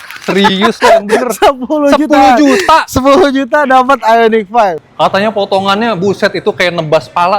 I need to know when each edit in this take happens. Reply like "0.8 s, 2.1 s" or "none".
4.8 s